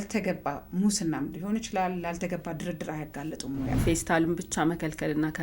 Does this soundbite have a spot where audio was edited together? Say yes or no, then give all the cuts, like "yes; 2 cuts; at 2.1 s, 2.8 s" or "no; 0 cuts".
yes; 1 cut; at 3.8 s